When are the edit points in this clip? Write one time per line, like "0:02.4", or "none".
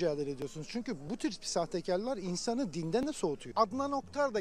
0:03.4